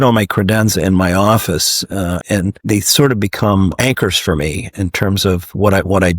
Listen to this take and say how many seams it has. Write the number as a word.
one